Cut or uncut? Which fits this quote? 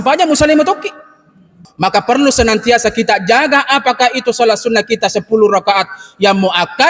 cut